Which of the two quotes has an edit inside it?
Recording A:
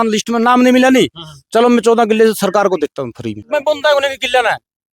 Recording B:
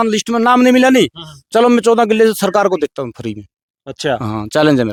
A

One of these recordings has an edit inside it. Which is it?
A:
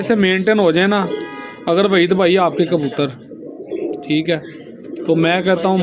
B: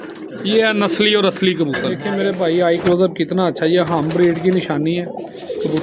B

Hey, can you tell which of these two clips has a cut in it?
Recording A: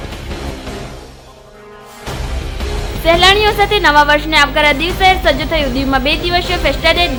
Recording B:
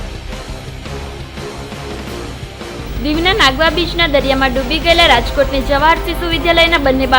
B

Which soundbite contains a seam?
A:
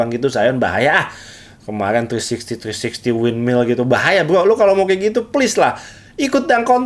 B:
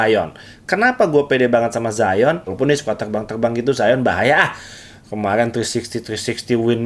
B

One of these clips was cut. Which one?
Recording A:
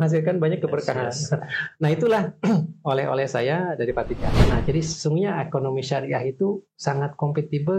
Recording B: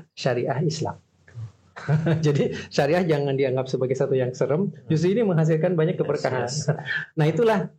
A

